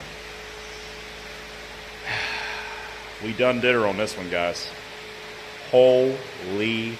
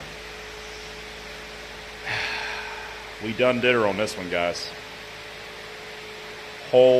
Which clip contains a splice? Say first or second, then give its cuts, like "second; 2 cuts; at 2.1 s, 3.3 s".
first; 1 cut; at 4.9 s